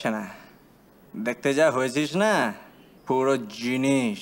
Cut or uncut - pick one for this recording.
uncut